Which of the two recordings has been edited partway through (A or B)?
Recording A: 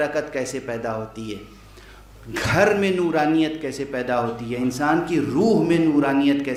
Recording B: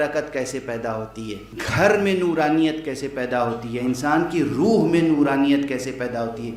B